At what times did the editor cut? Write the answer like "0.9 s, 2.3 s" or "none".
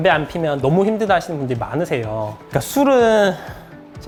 none